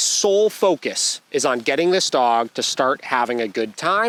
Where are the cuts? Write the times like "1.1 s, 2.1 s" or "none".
none